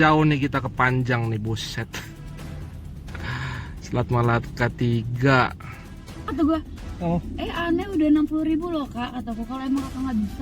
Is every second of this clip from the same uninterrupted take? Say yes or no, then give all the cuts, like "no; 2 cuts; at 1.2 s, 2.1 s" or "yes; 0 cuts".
no; 1 cut; at 6.3 s